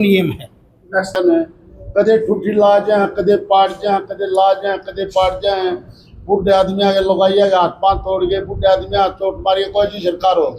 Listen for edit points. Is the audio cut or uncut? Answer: cut